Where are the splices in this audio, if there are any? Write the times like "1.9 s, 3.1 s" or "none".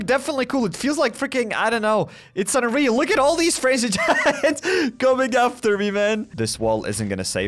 6.3 s